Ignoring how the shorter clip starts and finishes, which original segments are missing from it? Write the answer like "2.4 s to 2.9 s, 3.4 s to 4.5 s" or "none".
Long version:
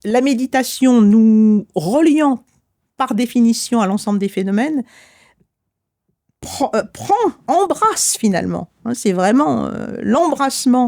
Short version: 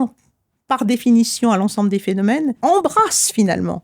4.9 s to 7.4 s

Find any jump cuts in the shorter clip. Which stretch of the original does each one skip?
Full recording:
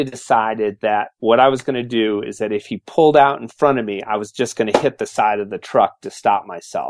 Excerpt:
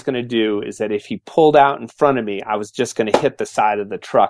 none

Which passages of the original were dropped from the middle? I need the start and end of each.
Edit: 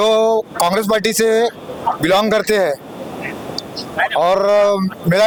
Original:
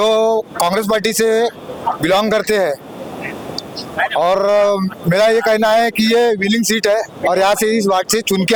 none

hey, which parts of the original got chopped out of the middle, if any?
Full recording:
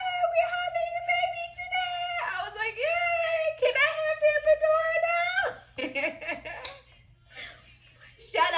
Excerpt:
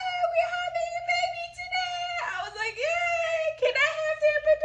none

